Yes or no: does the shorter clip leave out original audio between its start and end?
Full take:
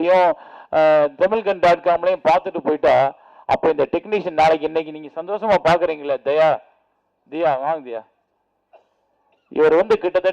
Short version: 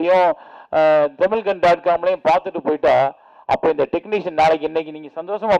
no